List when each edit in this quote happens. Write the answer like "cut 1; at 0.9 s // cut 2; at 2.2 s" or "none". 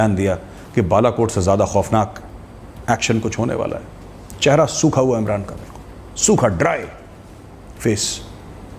none